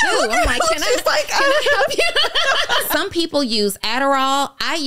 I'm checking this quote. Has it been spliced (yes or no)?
yes